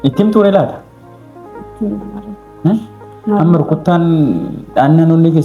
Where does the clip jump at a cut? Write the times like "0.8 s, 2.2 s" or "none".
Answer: none